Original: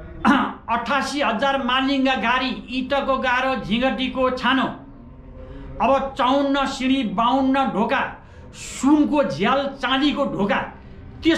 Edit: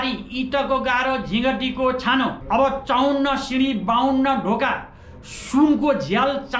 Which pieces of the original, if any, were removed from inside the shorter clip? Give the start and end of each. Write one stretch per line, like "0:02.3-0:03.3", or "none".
0:04.8-0:05.7